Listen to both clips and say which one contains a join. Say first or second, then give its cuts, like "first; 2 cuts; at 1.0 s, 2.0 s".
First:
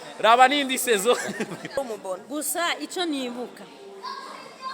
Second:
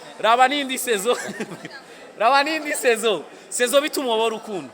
first; 1 cut; at 1.8 s